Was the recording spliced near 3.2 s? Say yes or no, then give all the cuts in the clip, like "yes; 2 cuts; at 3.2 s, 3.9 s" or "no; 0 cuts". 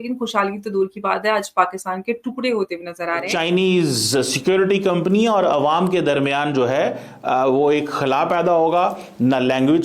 yes; 1 cut; at 3.2 s